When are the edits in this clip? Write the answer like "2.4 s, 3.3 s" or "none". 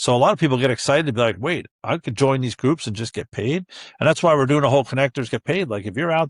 none